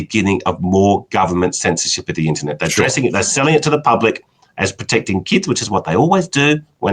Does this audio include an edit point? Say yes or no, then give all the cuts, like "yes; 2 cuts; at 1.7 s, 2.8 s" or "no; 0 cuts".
no; 0 cuts